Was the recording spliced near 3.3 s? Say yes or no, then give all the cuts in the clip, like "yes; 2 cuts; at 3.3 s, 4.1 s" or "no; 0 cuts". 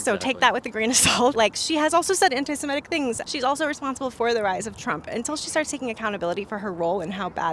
yes; 2 cuts; at 1.3 s, 3.3 s